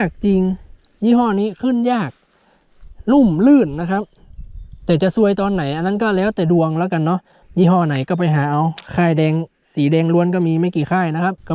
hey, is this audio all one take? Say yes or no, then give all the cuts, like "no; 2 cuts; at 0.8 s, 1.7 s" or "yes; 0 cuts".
no; 1 cut; at 7.3 s